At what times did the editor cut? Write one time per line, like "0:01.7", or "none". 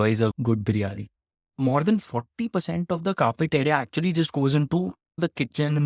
0:01.5